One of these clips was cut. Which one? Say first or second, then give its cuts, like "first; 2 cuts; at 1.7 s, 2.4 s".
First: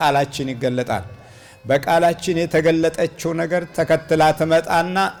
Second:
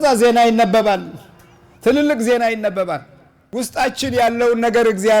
second; 1 cut; at 3.5 s